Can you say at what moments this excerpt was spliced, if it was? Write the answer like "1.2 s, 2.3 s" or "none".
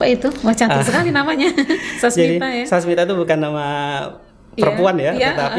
none